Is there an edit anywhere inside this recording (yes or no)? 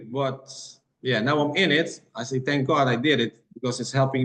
no